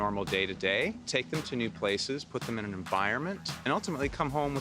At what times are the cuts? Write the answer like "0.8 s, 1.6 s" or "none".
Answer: 1.0 s, 3.6 s